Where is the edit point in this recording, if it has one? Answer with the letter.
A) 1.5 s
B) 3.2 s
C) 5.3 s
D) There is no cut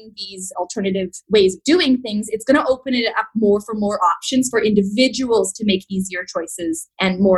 D